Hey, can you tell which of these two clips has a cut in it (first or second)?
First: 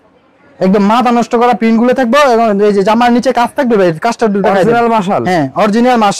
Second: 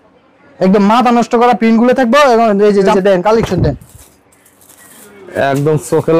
second